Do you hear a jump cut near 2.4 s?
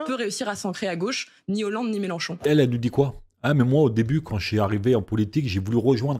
no; 0 cuts

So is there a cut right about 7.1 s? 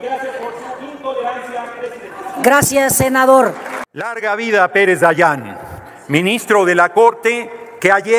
no; 1 cut; at 4.1 s

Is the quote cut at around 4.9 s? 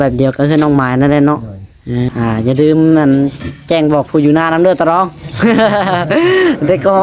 no; 1 cut; at 2.1 s

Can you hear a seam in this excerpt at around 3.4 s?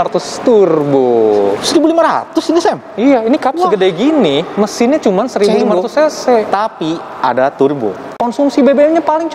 no; 1 cut; at 8.2 s

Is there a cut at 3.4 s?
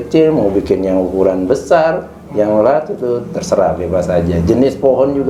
no; 0 cuts

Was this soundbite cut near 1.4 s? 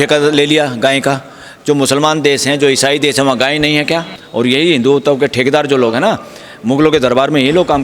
no; 1 cut; at 4.2 s

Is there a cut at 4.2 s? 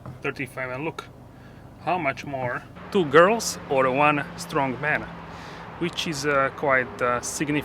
no; 1 cut; at 2.7 s

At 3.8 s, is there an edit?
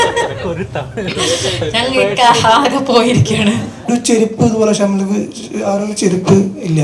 yes; 1 cut; at 3.8 s

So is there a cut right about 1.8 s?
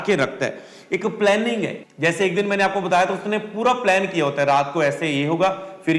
yes; 1 cut; at 1.8 s

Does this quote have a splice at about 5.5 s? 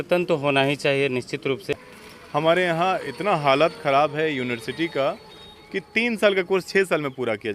no; 1 cut; at 1.7 s

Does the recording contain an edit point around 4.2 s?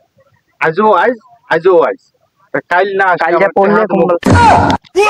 yes; 1 cut; at 4.2 s

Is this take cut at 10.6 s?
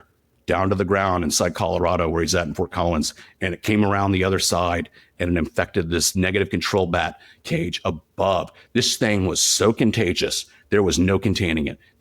no; 1 cut; at 6.1 s

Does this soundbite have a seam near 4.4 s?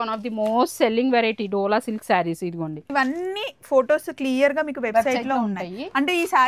no; 1 cut; at 2.9 s

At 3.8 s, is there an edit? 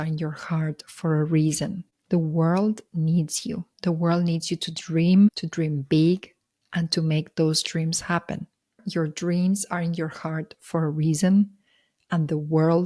no; 1 cut; at 8.8 s

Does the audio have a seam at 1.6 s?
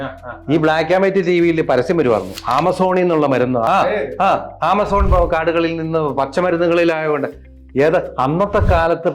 no; 1 cut; at 3.6 s

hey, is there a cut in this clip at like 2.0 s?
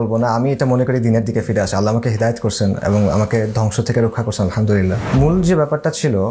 no; 1 cut; at 5.0 s

